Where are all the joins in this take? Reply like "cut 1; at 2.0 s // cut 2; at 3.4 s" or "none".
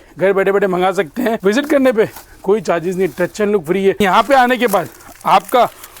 cut 1; at 1.4 s // cut 2; at 4.0 s